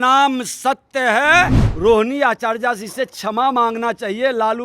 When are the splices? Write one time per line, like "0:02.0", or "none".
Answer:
0:01.6